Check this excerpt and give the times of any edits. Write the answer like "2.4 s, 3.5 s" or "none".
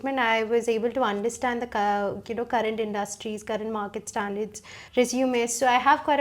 4.7 s